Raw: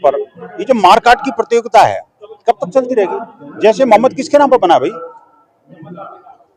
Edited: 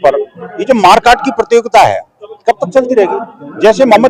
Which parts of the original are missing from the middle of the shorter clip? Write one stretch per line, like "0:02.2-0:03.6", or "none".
none